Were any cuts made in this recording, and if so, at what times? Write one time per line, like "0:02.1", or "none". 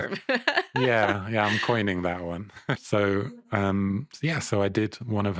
0:02.7